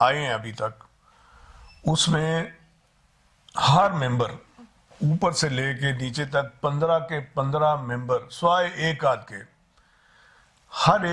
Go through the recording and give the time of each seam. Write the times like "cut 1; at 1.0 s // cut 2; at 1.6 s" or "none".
none